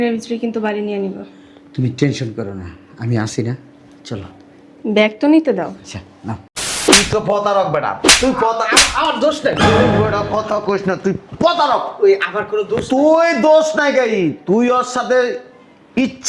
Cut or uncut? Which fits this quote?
cut